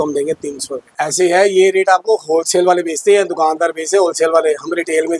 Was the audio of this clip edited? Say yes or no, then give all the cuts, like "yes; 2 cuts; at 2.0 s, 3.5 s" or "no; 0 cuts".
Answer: yes; 1 cut; at 1.0 s